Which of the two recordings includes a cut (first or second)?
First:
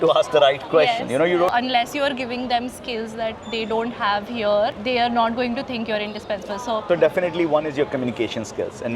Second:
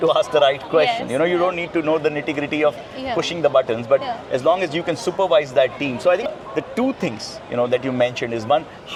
first